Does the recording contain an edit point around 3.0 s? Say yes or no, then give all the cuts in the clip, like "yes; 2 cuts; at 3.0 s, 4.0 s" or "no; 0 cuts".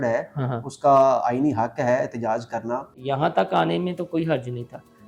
yes; 1 cut; at 3.0 s